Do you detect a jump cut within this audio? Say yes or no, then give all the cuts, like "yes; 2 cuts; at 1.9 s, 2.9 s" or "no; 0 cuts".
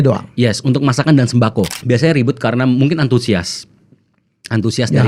yes; 1 cut; at 1.7 s